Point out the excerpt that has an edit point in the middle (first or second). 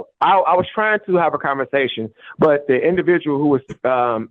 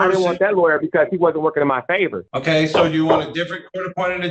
second